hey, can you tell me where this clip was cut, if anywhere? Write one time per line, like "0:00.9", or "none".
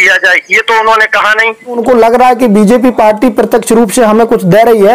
0:01.8